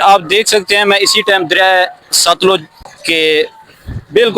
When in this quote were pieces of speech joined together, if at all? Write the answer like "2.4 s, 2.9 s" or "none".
2.8 s